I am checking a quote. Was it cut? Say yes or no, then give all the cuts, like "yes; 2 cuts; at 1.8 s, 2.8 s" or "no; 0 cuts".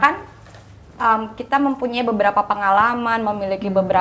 no; 0 cuts